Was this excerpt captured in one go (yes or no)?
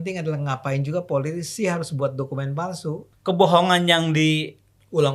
no